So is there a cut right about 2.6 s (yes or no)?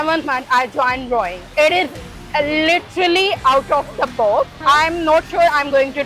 no